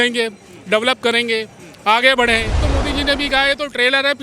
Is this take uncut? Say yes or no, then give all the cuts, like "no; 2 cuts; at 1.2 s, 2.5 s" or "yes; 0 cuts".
no; 1 cut; at 2.6 s